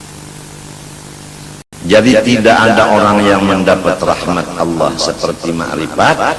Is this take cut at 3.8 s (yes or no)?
no